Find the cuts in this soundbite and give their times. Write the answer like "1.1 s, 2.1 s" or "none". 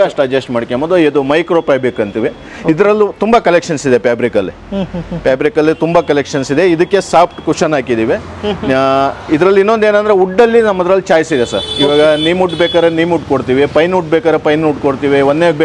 none